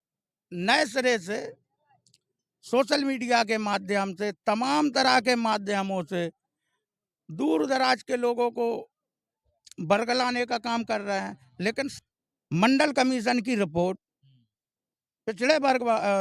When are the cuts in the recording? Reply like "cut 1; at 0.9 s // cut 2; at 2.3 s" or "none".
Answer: cut 1; at 12.0 s

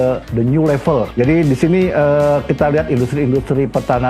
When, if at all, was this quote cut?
cut 1; at 1.1 s

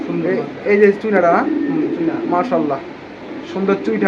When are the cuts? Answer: none

